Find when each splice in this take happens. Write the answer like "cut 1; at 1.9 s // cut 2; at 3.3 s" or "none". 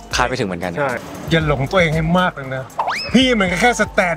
cut 1; at 1.3 s